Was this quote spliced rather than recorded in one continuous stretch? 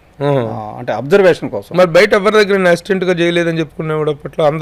no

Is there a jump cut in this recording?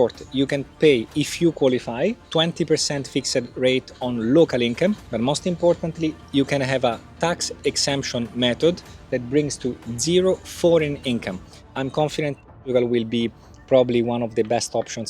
yes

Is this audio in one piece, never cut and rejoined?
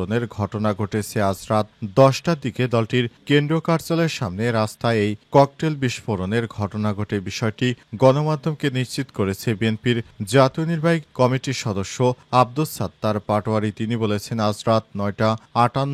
yes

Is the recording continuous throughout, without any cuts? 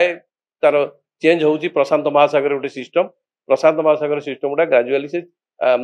yes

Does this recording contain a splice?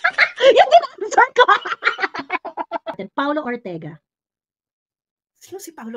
yes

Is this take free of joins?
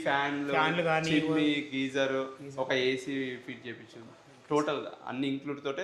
yes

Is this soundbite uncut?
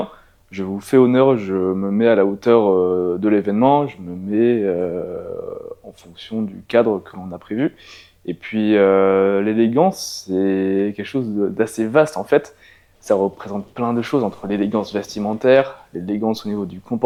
yes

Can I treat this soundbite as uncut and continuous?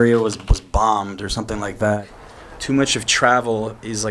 no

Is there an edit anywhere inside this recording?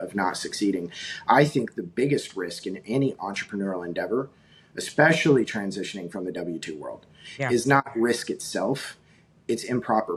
no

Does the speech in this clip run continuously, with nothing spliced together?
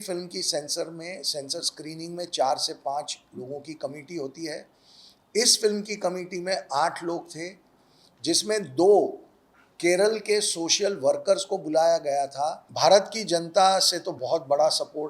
no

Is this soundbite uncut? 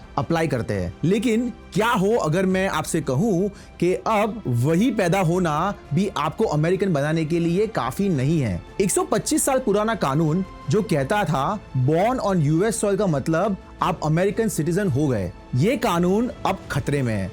no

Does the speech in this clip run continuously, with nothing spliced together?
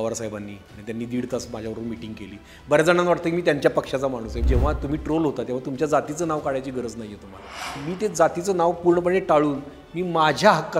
no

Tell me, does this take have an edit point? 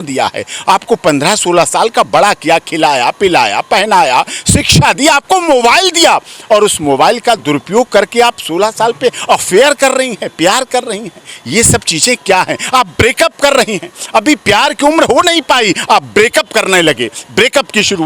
no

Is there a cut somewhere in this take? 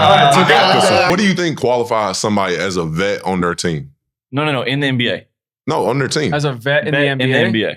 yes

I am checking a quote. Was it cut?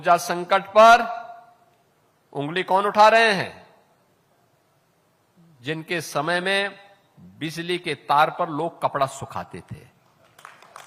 no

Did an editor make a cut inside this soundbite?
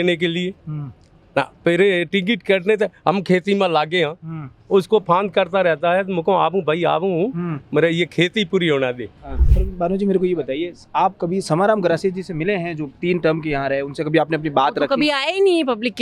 yes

